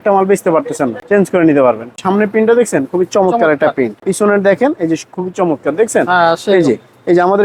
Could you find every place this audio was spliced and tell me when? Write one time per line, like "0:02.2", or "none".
0:01.9
0:04.0